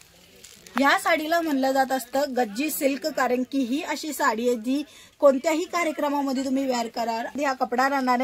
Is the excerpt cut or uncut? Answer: cut